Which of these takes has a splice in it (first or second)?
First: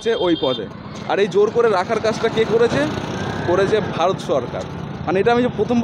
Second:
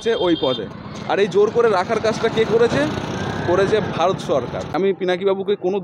second